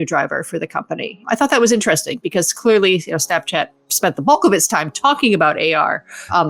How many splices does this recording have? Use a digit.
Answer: 1